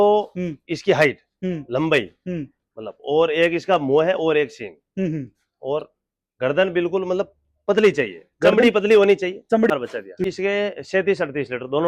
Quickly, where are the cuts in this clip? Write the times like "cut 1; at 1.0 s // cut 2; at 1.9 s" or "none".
cut 1; at 9.7 s